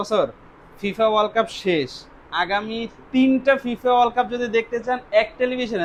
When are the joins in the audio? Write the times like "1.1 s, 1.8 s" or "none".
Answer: none